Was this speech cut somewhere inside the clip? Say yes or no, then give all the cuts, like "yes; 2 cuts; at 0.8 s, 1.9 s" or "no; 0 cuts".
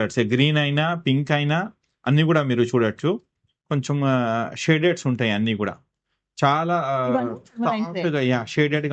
no; 0 cuts